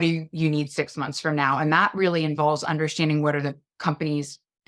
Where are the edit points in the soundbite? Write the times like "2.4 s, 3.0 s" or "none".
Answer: none